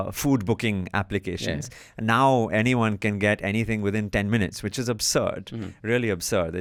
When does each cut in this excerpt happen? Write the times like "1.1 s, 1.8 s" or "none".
none